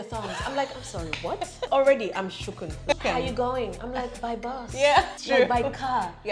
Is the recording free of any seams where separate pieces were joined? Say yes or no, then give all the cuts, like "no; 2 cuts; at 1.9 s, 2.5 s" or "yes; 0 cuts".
no; 3 cuts; at 1.7 s, 3.0 s, 5.2 s